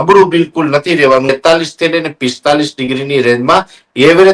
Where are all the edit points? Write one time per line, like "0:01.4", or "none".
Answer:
0:01.3